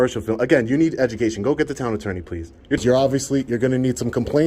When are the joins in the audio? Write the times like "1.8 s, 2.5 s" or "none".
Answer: 2.8 s